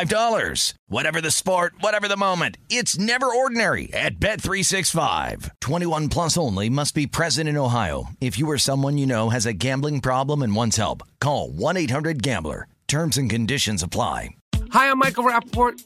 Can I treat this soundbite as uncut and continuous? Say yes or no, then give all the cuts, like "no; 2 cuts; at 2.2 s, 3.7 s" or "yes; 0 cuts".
no; 1 cut; at 14.3 s